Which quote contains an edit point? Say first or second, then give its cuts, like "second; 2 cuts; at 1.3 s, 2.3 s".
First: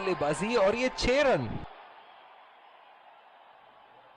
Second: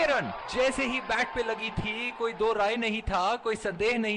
first; 2 cuts; at 1.6 s, 3.2 s